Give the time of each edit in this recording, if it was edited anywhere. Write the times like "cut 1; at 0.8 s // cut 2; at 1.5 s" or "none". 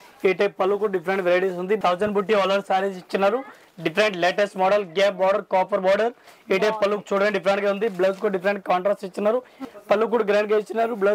cut 1; at 1.8 s // cut 2; at 9.6 s